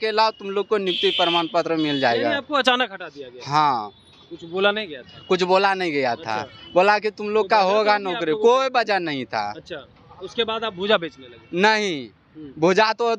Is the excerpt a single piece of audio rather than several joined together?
yes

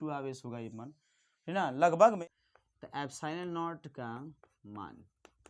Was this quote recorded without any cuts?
no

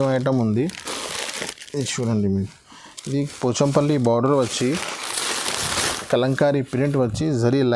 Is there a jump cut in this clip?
no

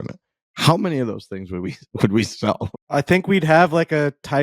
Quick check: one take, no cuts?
no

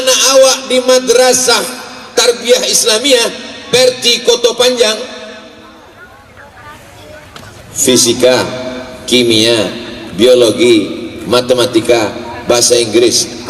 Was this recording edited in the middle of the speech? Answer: no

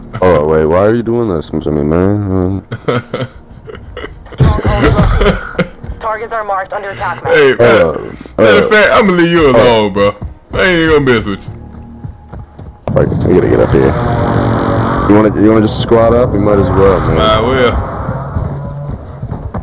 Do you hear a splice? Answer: yes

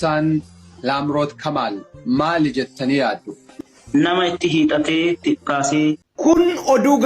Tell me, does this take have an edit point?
yes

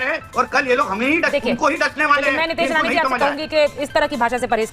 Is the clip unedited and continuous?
yes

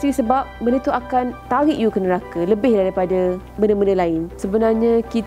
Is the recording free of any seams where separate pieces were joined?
no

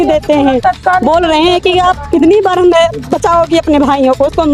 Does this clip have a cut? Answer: no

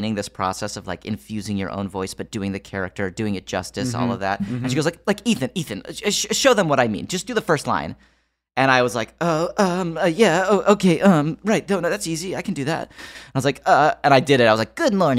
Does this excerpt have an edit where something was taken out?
no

